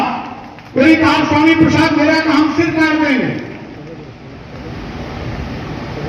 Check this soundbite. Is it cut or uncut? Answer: uncut